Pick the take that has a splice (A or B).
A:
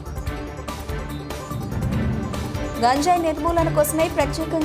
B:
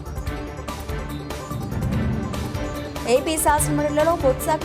B